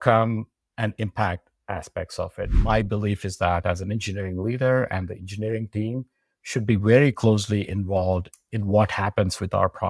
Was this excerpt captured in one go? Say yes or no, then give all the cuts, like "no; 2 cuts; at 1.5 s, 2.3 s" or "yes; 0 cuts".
no; 1 cut; at 2.5 s